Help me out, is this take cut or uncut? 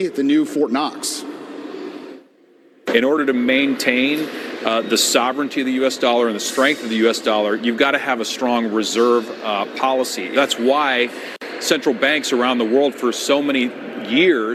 uncut